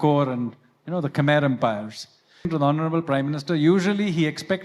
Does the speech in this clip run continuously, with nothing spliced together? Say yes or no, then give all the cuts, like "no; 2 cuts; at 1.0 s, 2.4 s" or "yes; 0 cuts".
no; 1 cut; at 2.5 s